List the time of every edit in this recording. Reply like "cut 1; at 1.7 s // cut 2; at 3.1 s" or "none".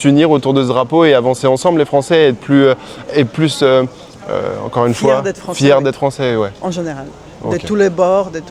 none